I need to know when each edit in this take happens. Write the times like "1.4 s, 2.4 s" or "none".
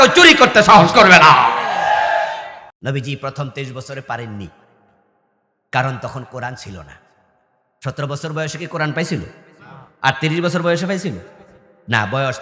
2.7 s